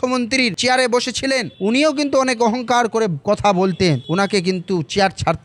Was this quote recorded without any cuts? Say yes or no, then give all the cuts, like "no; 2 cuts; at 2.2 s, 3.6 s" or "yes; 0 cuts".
yes; 0 cuts